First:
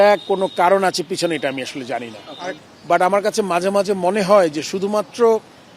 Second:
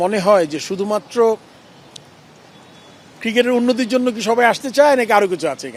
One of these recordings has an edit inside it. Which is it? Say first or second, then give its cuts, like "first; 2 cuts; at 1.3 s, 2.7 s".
first; 1 cut; at 2.4 s